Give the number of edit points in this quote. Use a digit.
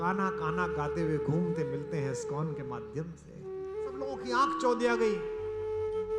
1